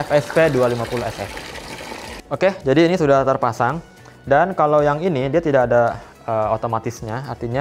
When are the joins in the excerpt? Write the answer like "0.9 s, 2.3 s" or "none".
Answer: 2.1 s